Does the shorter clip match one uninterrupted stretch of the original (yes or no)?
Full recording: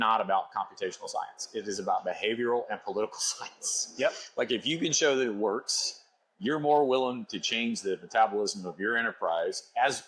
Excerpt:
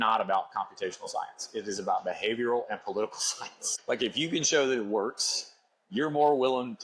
no